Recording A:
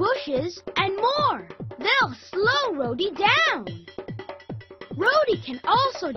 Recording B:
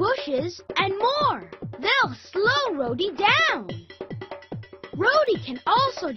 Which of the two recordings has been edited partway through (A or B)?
B